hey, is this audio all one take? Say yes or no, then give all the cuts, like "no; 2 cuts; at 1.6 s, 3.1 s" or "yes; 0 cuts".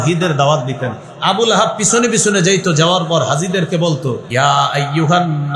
no; 1 cut; at 4.2 s